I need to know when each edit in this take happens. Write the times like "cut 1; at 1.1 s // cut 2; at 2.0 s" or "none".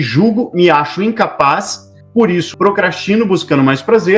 cut 1; at 2.2 s